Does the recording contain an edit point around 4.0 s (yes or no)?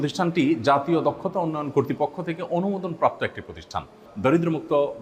yes